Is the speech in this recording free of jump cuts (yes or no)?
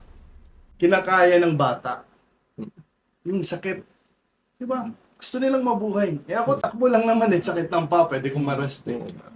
yes